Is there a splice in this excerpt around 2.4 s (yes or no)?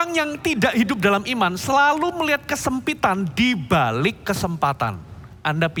no